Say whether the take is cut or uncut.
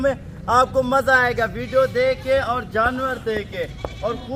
uncut